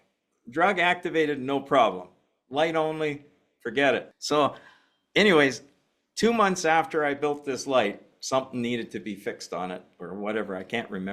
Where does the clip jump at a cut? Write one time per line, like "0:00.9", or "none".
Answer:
0:04.1
0:08.1